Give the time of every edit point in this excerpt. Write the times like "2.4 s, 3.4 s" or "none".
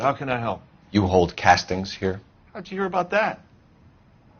3.4 s